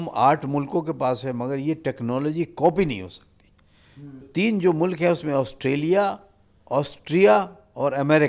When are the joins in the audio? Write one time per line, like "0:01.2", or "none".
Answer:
0:04.3